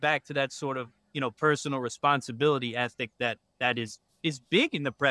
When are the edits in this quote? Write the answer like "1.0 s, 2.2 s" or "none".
none